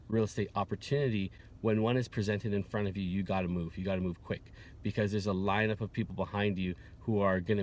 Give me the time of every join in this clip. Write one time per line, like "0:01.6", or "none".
none